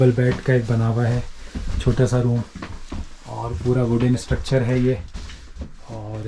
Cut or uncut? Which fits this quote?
uncut